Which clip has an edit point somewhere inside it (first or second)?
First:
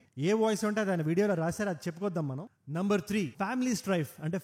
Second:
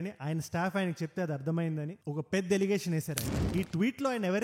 second